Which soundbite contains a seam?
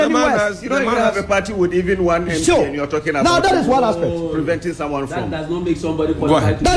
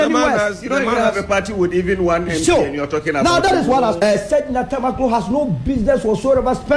second; 1 cut; at 4.0 s

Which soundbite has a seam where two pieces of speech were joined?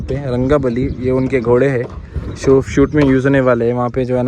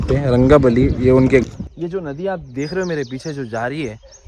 second; 1 cut; at 1.4 s

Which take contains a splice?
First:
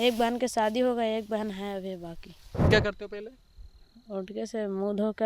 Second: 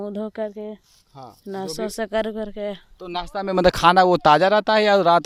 first; 1 cut; at 2.7 s

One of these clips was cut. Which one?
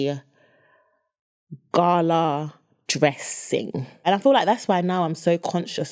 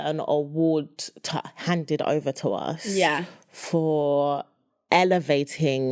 first; 1 cut; at 4.1 s

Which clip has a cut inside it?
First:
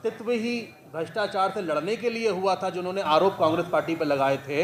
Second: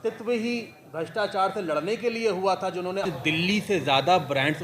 second; 1 cut; at 3.0 s

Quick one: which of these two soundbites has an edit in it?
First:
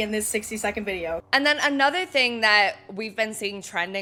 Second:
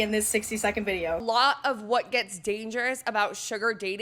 second; 1 cut; at 1.2 s

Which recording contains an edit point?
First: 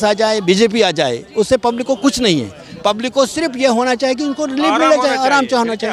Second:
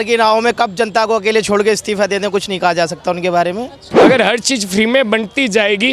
second; 1 cut; at 3.9 s

